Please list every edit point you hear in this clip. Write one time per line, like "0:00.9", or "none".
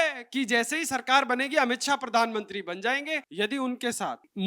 0:03.2